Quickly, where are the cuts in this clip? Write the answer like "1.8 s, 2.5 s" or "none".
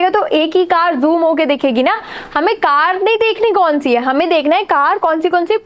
none